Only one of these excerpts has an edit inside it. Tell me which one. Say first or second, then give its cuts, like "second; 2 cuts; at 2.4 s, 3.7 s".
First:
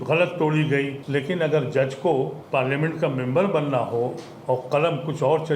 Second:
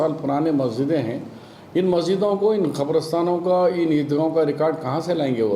first; 2 cuts; at 1.0 s, 2.4 s